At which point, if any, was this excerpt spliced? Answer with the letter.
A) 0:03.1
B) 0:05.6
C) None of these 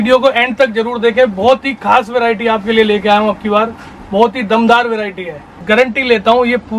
B